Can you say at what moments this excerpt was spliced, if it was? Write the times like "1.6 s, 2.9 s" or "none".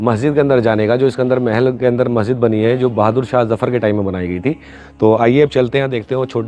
none